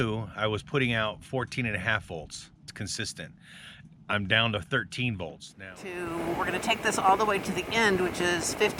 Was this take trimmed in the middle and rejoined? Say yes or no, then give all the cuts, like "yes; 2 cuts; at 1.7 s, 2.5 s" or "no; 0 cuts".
yes; 2 cuts; at 2.7 s, 5.8 s